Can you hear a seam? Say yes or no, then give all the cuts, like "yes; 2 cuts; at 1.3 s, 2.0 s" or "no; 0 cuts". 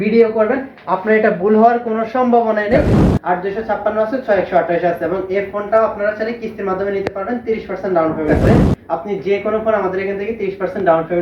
yes; 2 cuts; at 2.8 s, 8.4 s